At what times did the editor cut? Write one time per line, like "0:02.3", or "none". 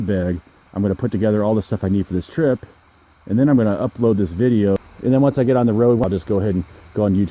0:04.8
0:06.0